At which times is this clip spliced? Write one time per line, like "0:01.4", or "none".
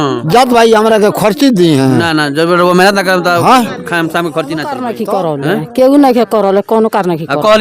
0:04.9